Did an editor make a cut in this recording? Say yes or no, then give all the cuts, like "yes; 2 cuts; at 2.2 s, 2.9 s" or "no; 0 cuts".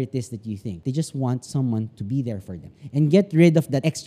yes; 1 cut; at 2.8 s